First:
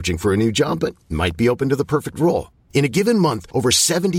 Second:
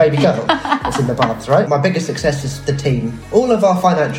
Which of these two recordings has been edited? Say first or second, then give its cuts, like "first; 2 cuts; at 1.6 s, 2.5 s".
second; 2 cuts; at 1.7 s, 3.2 s